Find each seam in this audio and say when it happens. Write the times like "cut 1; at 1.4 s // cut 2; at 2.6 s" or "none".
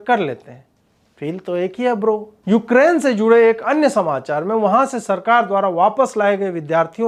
none